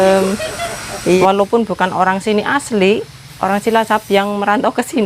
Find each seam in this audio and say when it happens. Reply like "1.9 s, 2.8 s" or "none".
1.2 s